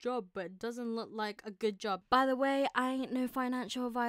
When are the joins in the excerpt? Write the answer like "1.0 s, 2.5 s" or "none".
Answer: 2.0 s